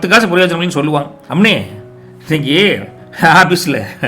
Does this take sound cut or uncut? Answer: cut